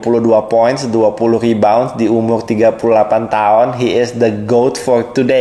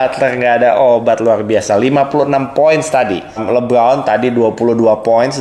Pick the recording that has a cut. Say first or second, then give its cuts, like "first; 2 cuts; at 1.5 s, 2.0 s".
second; 1 cut; at 3.4 s